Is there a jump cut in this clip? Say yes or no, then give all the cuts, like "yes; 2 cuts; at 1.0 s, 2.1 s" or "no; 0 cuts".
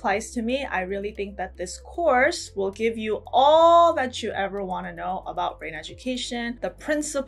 no; 0 cuts